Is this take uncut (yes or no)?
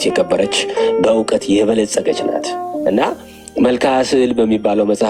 yes